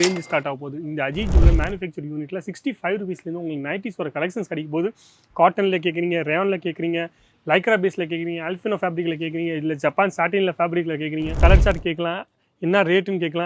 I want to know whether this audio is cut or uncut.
cut